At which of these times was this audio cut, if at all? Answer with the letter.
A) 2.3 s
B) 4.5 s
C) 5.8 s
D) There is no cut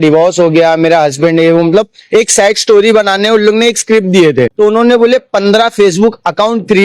B